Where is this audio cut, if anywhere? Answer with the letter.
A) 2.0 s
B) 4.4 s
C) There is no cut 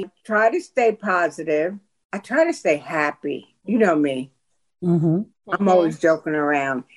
C